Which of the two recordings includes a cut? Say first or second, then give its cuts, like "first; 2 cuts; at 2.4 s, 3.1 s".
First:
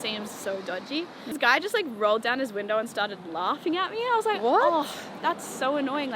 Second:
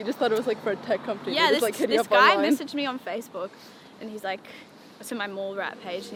first; 1 cut; at 1.3 s